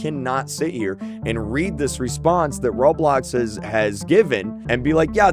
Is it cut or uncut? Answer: uncut